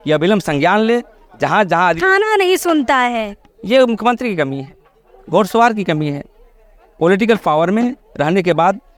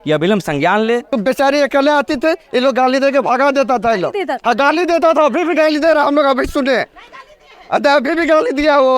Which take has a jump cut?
second; 1 cut; at 1.2 s

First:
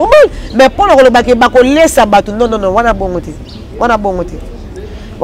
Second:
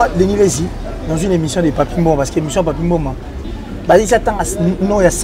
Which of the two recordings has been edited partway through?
second; 1 cut; at 3.4 s

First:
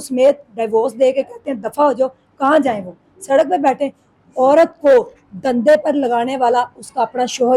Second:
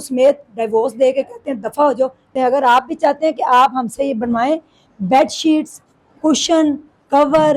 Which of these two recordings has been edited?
second; 1 cut; at 2.3 s

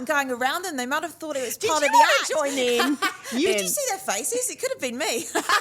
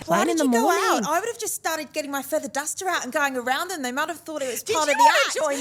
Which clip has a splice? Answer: first; 1 cut; at 3.5 s

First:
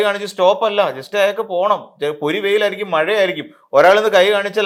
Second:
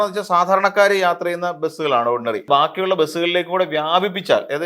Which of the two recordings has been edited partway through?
second; 1 cut; at 2.5 s

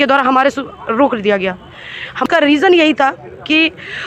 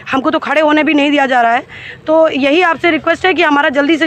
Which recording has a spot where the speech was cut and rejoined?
first; 1 cut; at 2.2 s

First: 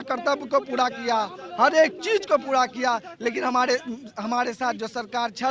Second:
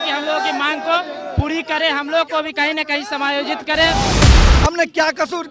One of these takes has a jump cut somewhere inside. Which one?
second; 1 cut; at 4.3 s

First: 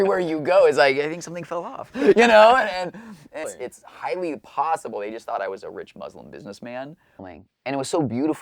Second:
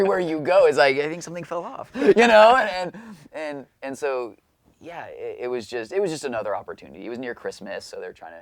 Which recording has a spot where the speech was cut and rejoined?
first; 2 cuts; at 3.4 s, 7.3 s

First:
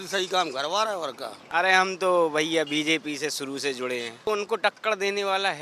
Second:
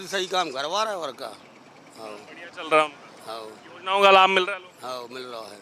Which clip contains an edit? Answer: first; 2 cuts; at 1.4 s, 4.3 s

